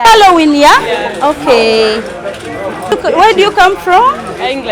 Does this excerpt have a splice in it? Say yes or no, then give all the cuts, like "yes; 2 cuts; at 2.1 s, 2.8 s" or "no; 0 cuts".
yes; 1 cut; at 2.9 s